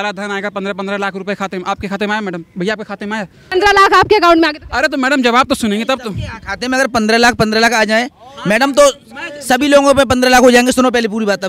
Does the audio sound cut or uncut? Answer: cut